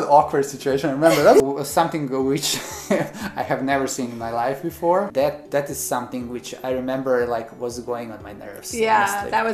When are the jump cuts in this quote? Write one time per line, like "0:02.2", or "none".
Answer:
0:01.4
0:05.1

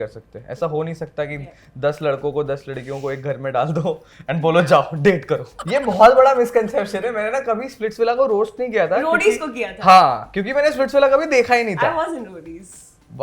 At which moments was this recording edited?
0:05.6

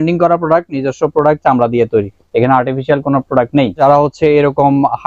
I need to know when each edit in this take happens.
0:03.8

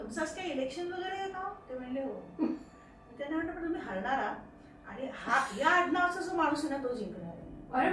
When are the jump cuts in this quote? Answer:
none

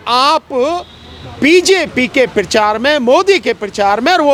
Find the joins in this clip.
none

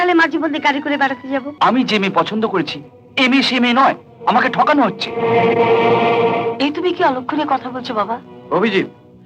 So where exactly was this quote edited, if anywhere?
0:01.5

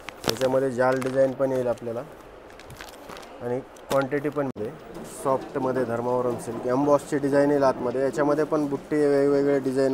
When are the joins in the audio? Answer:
0:04.5

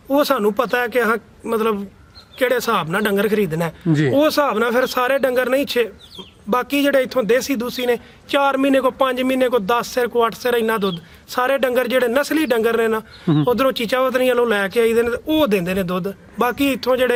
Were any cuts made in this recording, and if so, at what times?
none

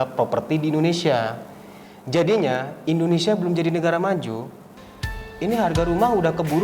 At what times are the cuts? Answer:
none

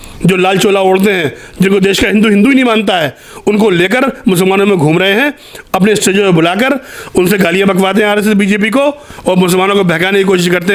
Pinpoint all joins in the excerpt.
none

